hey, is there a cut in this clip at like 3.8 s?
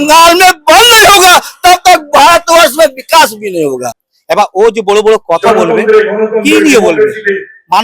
yes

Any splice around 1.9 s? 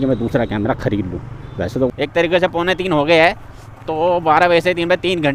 yes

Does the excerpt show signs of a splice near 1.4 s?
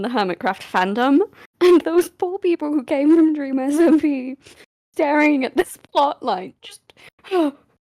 yes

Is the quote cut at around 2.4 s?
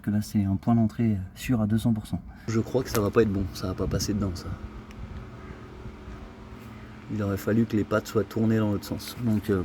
yes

